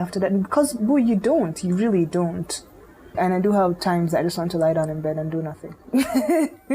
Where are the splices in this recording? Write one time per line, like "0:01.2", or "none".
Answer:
0:03.1
0:05.7